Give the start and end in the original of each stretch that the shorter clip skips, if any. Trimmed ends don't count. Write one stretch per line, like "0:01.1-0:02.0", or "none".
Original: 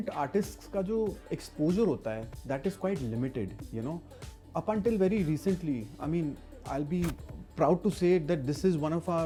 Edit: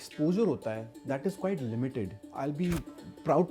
0:03.6-0:06.5